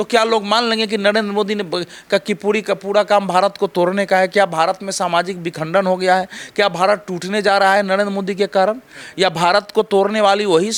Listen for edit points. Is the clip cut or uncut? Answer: uncut